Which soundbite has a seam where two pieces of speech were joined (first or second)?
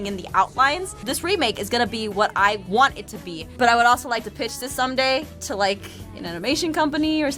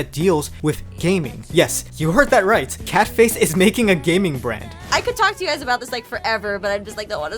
second